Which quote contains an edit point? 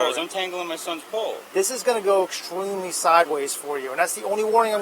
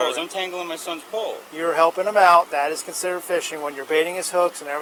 first; 1 cut; at 1.4 s

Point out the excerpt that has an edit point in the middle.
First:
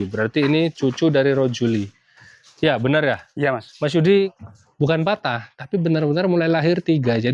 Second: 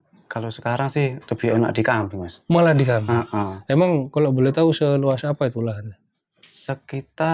first; 1 cut; at 4.3 s

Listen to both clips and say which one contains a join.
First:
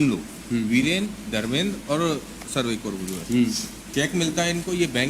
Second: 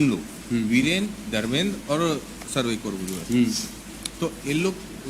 first; 1 cut; at 3.7 s

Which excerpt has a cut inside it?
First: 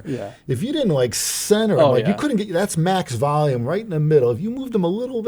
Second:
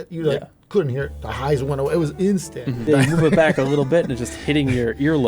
second; 1 cut; at 2.9 s

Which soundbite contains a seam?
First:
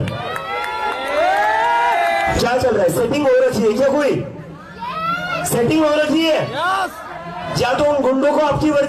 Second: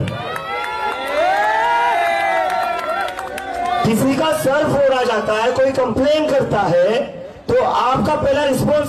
first; 2 cuts; at 2.4 s, 7.4 s

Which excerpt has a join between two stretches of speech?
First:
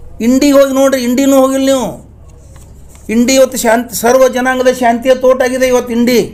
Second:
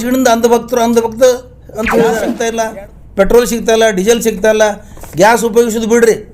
second; 1 cut; at 2.4 s

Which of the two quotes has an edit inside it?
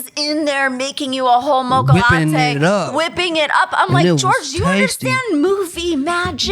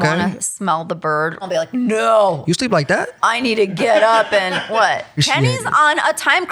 second; 2 cuts; at 1.4 s, 5.2 s

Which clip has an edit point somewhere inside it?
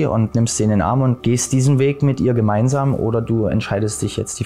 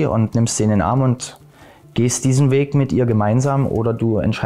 first; 1 cut; at 1.2 s

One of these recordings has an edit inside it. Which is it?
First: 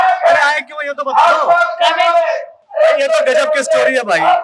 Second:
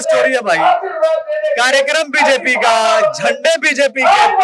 first; 1 cut; at 2.5 s

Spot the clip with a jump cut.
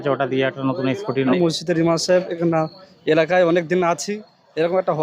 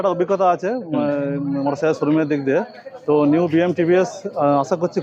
first; 1 cut; at 1.3 s

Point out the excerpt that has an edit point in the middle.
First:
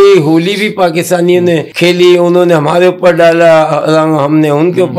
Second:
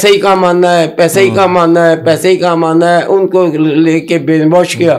first; 1 cut; at 1.7 s

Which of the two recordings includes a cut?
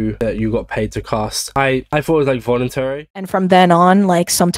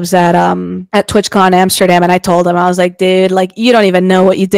first; 1 cut; at 3.3 s

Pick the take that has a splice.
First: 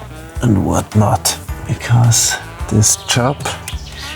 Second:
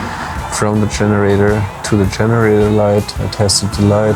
first; 2 cuts; at 1.5 s, 2.5 s

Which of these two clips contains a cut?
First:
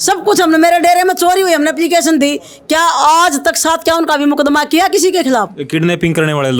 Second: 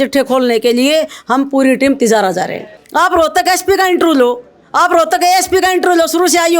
second; 1 cut; at 2.8 s

